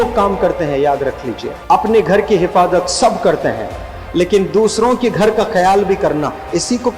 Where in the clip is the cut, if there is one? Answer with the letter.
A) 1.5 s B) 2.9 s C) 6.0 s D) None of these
A